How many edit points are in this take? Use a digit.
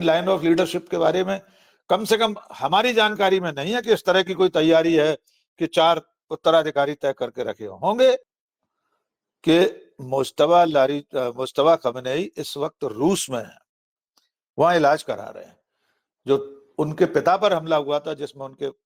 1